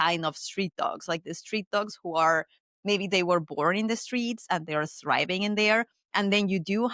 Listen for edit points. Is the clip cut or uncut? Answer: uncut